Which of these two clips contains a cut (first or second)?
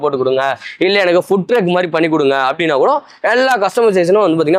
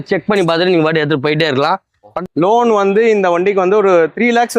second